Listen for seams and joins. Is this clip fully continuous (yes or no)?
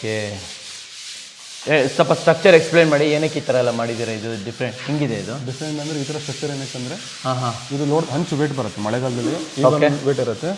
yes